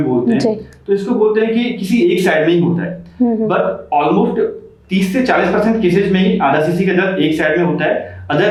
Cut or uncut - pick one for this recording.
uncut